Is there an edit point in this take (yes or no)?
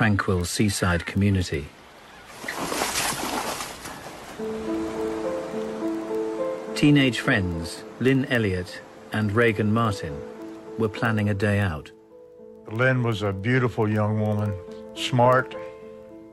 no